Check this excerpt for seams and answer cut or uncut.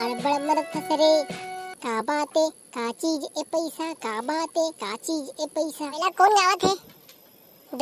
cut